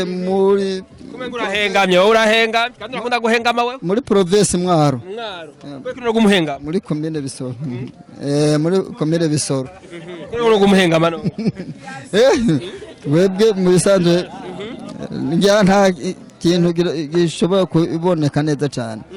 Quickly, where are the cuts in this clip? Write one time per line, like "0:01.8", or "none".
none